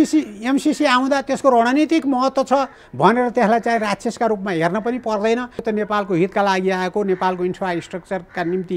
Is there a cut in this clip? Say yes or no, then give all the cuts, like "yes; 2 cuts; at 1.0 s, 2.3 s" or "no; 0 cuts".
yes; 1 cut; at 5.5 s